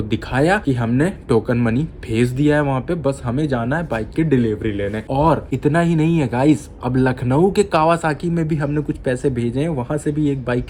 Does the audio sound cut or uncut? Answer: uncut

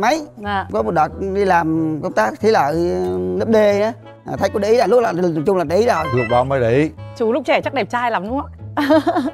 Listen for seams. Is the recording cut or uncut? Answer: cut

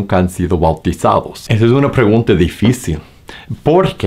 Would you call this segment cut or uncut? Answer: uncut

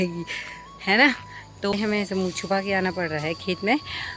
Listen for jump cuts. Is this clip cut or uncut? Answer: cut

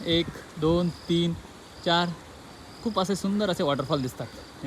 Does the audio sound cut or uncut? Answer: uncut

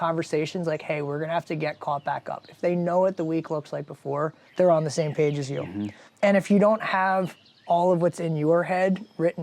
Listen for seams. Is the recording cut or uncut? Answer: cut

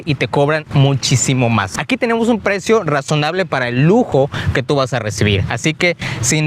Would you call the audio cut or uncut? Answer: cut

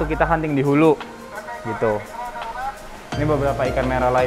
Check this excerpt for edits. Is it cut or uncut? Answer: uncut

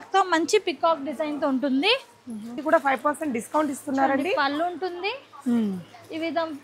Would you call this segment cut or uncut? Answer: cut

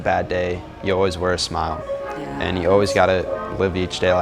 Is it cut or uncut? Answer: uncut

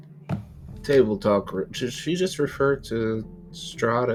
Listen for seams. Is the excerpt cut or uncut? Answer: uncut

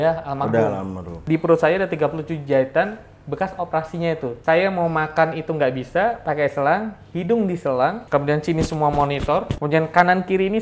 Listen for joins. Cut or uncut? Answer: cut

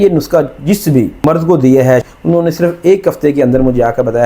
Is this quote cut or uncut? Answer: cut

